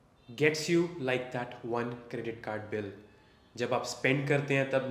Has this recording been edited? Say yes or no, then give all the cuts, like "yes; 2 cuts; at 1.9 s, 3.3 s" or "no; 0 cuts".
no; 0 cuts